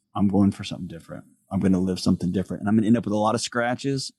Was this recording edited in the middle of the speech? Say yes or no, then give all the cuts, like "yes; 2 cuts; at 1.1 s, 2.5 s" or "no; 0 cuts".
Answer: no; 0 cuts